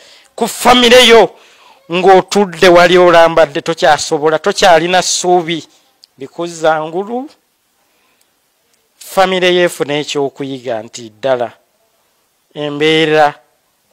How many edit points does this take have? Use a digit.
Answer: 0